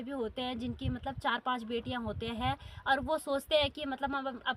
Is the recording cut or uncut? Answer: uncut